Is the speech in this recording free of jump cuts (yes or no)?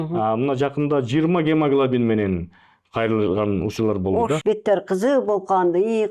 no